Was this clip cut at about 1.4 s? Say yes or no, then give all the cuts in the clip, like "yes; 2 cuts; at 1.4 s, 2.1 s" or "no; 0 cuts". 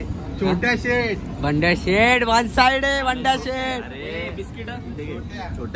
no; 0 cuts